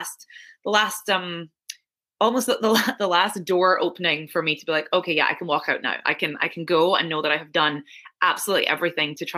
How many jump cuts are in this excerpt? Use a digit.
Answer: 0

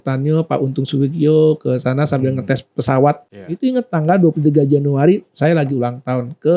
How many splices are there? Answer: 1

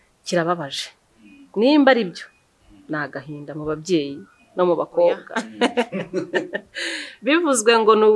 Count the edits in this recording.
1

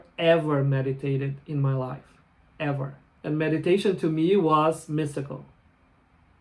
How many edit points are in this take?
1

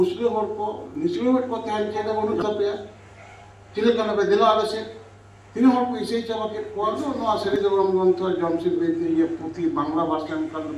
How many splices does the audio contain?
2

